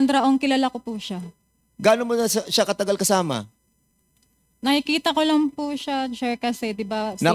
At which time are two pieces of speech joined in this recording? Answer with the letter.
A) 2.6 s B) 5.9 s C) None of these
C